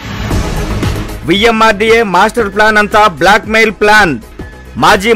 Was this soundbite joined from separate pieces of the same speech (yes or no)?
yes